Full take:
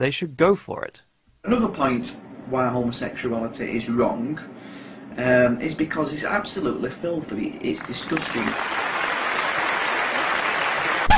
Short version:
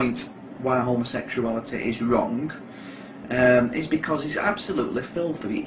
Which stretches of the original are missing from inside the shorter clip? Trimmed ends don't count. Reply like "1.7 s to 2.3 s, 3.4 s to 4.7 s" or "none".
none